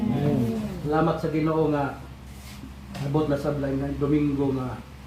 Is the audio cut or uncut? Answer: uncut